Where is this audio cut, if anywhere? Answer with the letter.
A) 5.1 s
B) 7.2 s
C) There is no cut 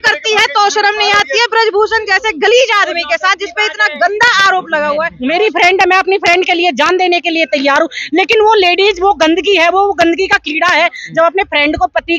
A